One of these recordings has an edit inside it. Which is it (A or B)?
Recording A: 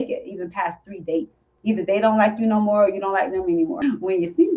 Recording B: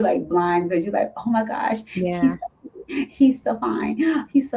A